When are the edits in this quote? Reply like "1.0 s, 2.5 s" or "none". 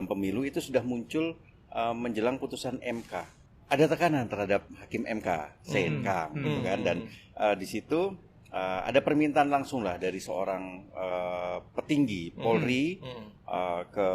3.4 s